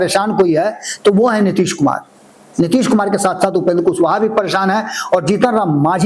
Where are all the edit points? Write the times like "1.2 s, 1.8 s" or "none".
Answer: none